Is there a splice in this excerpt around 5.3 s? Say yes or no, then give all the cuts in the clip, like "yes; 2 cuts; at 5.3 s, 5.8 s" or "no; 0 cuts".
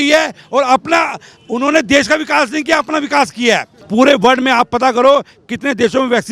no; 1 cut; at 3.8 s